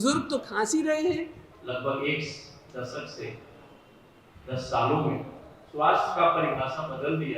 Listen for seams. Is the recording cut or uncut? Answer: cut